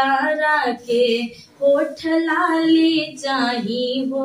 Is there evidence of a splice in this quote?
no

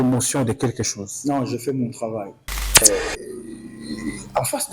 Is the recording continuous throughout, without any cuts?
no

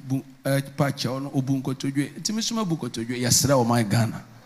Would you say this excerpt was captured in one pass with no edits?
yes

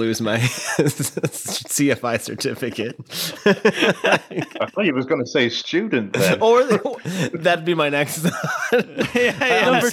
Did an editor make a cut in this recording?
no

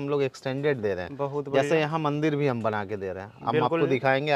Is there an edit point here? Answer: no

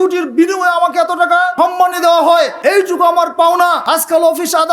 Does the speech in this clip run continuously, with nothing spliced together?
no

